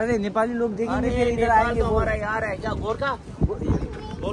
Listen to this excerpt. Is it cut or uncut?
uncut